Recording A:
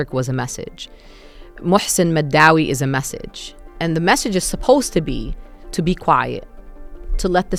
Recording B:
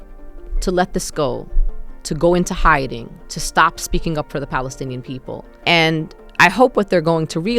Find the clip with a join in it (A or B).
B